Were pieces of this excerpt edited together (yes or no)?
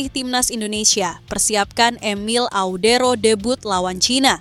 no